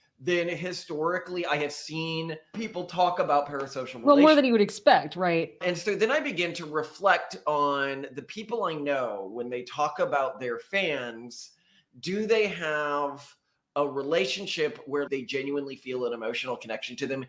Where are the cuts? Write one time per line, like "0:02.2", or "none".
0:02.6
0:05.5
0:15.1